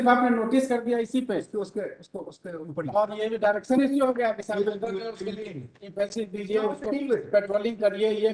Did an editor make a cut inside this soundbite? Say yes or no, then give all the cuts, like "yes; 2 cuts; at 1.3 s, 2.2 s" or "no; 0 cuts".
no; 0 cuts